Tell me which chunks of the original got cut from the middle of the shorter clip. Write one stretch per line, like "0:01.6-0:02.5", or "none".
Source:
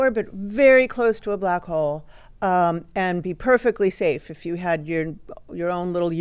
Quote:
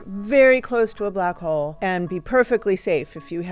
0:02.0-0:02.9